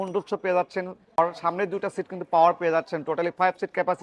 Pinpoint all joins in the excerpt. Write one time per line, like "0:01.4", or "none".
0:01.2